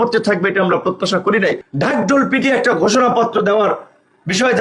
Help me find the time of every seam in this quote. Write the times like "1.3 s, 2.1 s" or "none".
1.7 s